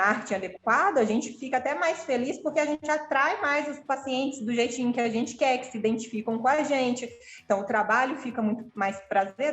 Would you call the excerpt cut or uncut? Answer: uncut